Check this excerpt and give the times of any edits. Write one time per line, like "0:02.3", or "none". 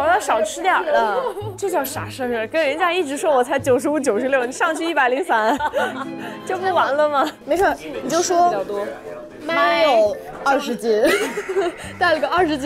none